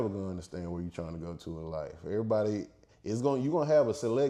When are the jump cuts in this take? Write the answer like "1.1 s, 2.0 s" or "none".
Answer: none